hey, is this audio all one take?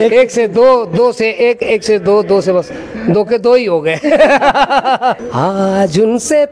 no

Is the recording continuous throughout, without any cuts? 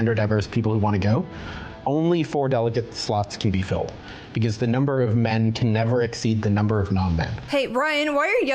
no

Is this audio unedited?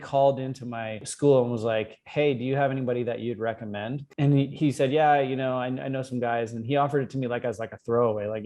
no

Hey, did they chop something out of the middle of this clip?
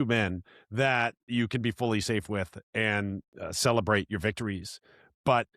yes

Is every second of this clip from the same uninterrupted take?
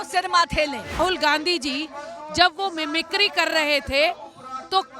no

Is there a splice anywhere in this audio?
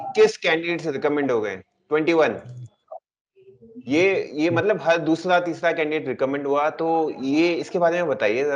no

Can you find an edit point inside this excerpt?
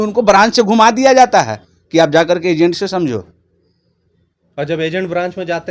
no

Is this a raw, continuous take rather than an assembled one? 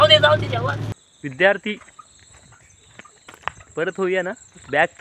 no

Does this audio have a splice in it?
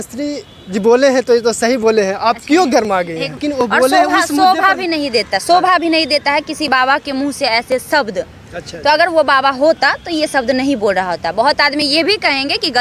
yes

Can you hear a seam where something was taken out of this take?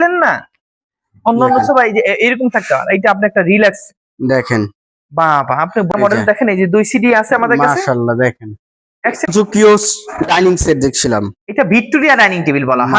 yes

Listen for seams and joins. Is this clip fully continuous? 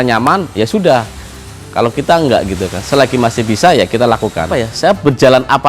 no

